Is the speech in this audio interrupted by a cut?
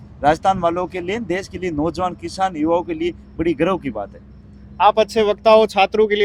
no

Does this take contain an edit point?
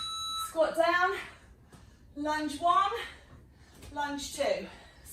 no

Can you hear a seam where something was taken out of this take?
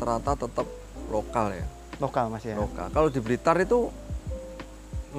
no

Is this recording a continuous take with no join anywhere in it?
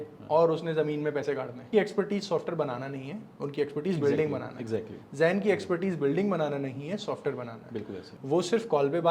no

